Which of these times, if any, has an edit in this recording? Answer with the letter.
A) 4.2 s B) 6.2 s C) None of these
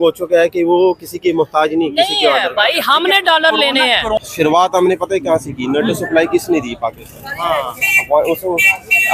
A